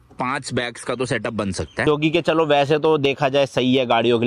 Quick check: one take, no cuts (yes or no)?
no